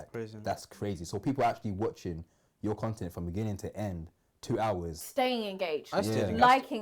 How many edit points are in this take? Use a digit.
1